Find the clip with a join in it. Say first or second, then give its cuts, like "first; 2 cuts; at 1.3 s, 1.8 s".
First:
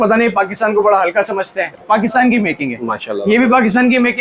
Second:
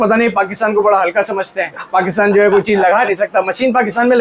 first; 1 cut; at 1.7 s